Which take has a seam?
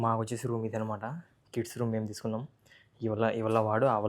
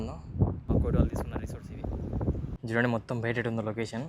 second; 2 cuts; at 0.7 s, 2.6 s

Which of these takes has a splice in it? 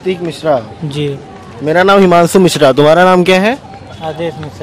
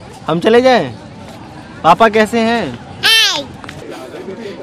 second; 1 cut; at 3.6 s

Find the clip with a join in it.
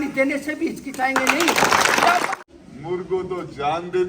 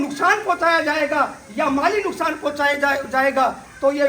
first; 1 cut; at 2.3 s

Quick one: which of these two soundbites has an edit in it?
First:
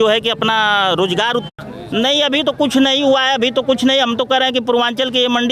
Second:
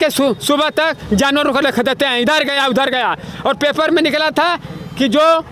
first; 1 cut; at 1.6 s

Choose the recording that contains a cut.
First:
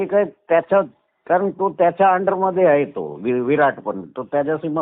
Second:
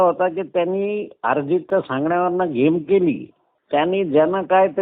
second; 1 cut; at 3.5 s

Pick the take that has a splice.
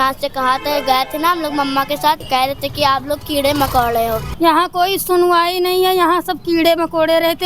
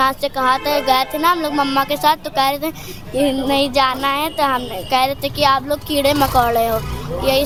first; 2 cuts; at 2.2 s, 4.3 s

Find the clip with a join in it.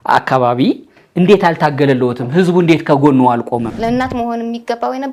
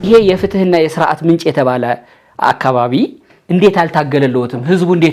first; 1 cut; at 3.7 s

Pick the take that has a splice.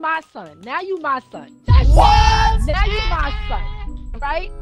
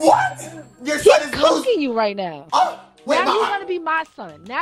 second; 1 cut; at 2.3 s

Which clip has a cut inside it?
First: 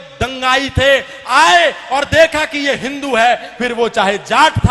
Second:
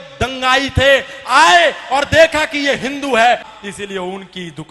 second; 1 cut; at 3.5 s

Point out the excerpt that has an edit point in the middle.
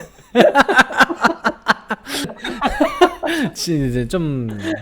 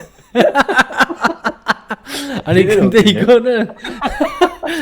first; 1 cut; at 2.3 s

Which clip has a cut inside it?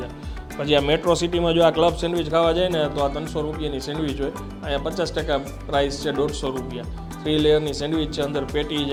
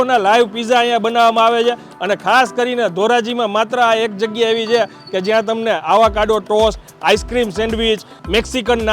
second; 1 cut; at 1.9 s

